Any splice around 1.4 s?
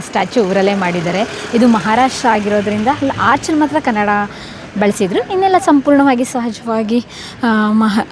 no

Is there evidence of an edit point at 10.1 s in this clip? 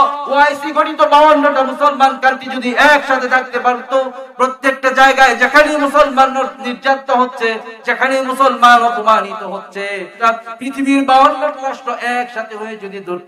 yes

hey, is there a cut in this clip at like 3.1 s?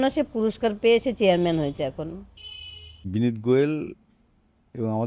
yes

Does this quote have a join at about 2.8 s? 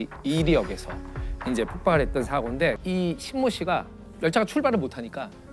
yes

